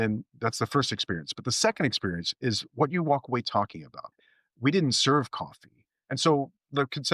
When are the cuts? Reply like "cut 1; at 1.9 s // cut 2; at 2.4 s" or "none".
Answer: cut 1; at 4.0 s